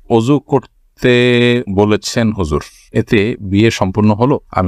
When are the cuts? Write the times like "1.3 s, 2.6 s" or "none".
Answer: none